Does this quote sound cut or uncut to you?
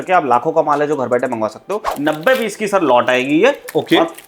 cut